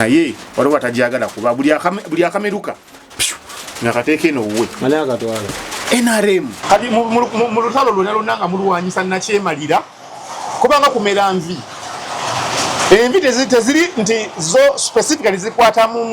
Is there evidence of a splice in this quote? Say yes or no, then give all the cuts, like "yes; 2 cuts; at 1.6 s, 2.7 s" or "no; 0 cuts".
yes; 1 cut; at 6.5 s